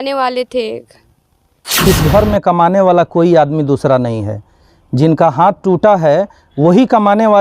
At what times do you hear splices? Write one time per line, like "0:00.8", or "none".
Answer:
0:01.8